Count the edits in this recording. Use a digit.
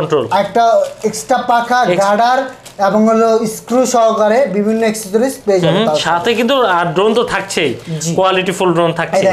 0